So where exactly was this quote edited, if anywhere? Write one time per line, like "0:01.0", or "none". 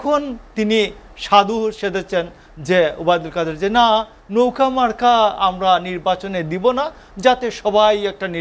none